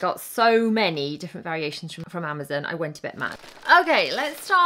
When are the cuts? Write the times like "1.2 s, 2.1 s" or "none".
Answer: 2.0 s, 3.4 s